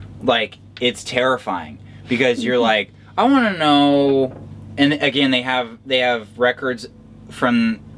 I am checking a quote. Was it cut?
no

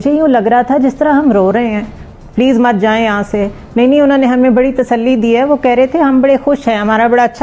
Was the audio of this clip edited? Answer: no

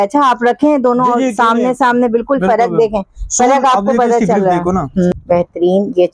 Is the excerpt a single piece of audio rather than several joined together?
no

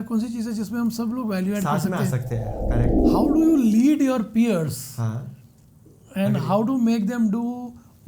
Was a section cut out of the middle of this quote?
yes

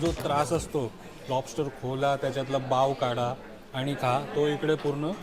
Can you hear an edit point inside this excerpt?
no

